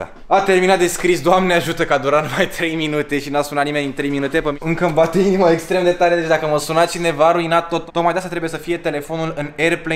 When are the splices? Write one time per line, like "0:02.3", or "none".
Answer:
0:04.6
0:07.9

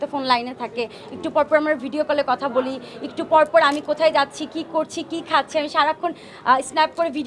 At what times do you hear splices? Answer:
none

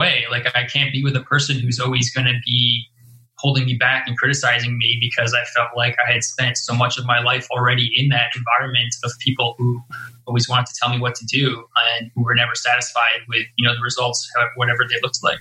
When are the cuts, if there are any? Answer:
none

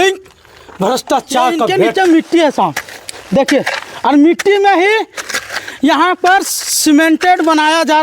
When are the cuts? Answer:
0:01.7

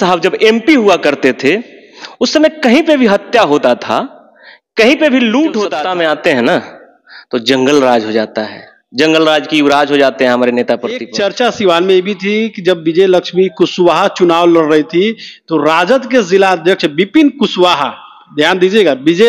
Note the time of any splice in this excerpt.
0:05.7
0:11.1

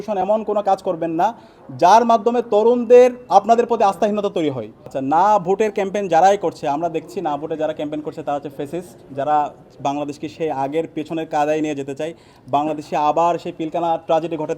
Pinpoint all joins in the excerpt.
0:04.7

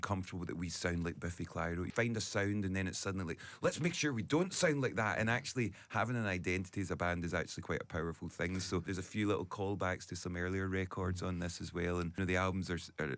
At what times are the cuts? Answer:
0:01.9
0:08.9
0:12.1

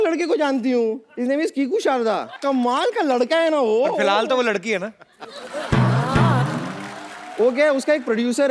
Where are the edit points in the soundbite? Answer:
0:01.1
0:02.4

